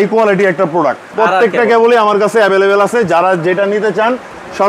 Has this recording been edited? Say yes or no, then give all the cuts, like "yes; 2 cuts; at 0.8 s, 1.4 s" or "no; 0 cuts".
yes; 1 cut; at 1.1 s